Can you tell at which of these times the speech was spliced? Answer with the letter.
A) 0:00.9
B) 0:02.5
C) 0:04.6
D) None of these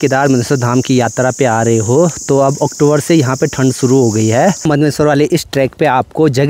C